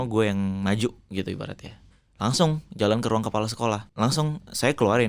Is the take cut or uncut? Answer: cut